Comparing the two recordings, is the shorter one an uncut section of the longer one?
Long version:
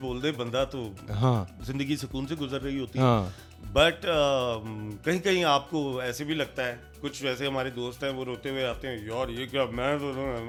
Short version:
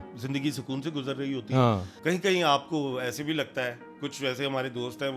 no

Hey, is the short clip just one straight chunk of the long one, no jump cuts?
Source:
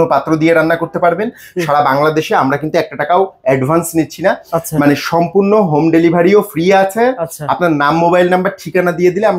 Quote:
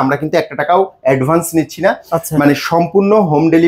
yes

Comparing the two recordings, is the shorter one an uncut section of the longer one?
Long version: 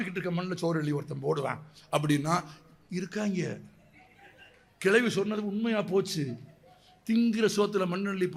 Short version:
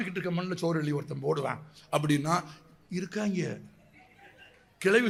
yes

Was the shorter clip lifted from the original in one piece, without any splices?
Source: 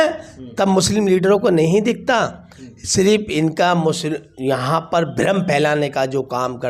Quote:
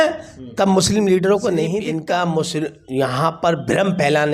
no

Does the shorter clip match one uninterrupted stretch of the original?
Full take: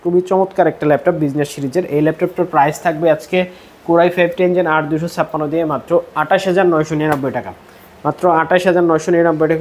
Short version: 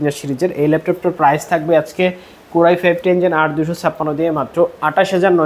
yes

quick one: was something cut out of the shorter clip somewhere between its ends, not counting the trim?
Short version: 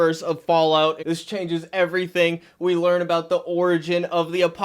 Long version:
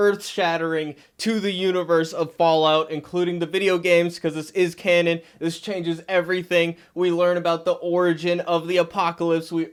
yes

